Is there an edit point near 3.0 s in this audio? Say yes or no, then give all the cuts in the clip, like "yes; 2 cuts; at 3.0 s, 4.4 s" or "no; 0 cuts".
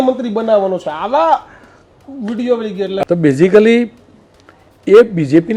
yes; 1 cut; at 3.0 s